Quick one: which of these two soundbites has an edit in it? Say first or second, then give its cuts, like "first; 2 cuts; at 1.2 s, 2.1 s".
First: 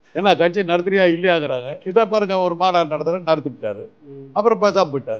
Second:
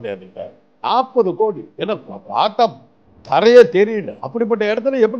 second; 2 cuts; at 1.7 s, 4.2 s